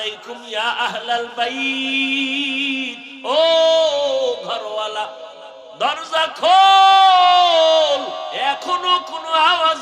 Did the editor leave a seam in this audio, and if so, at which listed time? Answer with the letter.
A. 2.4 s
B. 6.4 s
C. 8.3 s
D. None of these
C